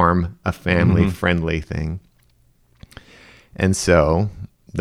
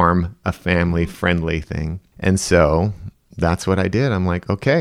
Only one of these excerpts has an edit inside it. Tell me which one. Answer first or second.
second